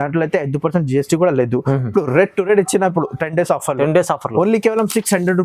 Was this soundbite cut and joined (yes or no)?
no